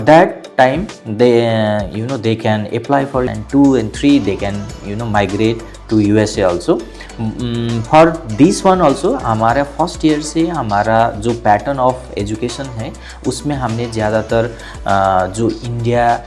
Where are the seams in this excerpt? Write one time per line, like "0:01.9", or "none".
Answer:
0:03.3